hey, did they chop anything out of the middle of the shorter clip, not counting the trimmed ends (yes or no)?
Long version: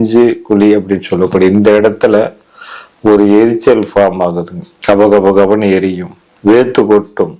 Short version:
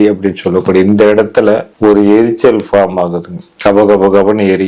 yes